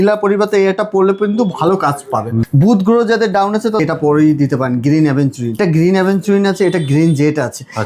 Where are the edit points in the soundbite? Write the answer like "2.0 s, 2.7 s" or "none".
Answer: 2.4 s, 3.8 s, 5.6 s